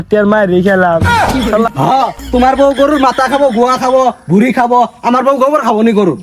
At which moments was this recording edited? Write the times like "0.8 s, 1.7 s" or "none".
1.5 s